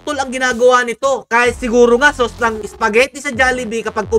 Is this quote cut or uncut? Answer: uncut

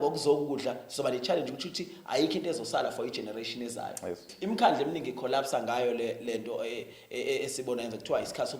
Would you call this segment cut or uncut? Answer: cut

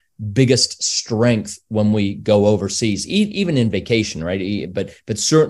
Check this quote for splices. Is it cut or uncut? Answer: uncut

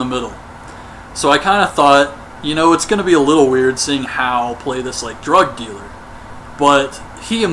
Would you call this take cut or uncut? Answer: cut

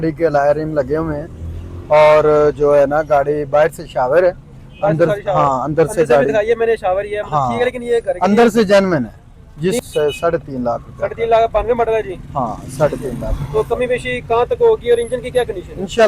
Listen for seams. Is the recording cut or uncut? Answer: cut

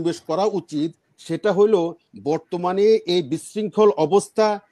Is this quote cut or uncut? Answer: uncut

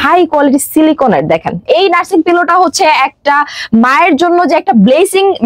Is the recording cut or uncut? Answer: cut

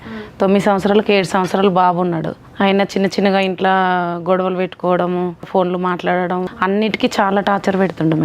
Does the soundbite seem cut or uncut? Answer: cut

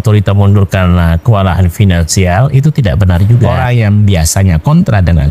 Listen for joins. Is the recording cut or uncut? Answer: cut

